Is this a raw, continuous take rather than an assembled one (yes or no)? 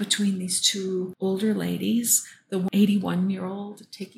no